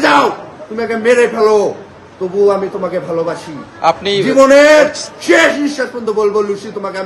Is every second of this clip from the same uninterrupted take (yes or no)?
yes